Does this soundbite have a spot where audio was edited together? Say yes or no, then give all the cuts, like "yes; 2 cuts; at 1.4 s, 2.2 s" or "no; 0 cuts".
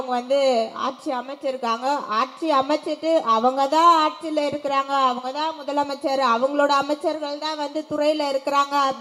no; 0 cuts